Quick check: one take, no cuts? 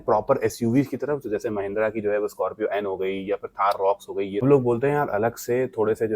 no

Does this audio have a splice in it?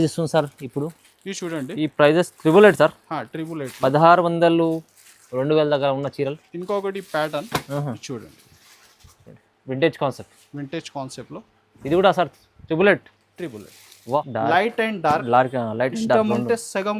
yes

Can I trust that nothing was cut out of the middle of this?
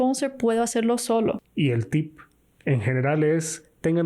no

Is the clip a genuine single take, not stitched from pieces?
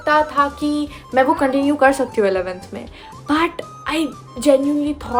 yes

